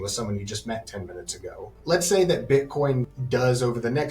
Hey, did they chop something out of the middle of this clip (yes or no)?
yes